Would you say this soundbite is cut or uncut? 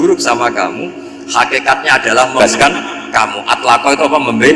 cut